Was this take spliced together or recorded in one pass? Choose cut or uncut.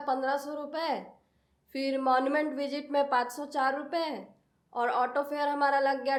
uncut